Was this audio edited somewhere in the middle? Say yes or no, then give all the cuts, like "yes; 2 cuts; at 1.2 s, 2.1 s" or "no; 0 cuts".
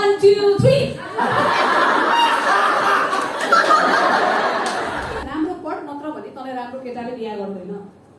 yes; 1 cut; at 5.2 s